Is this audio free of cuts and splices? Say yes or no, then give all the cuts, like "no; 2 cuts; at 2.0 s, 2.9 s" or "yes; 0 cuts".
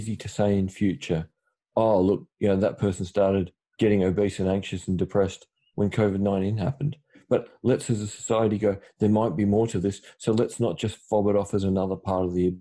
no; 2 cuts; at 3.6 s, 5.7 s